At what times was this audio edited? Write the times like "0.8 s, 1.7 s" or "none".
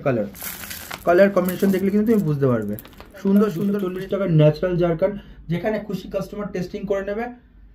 3.9 s